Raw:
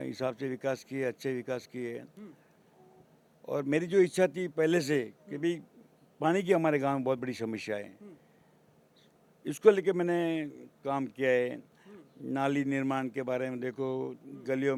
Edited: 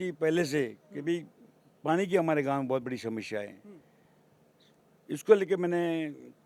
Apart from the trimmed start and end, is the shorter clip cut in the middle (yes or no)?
no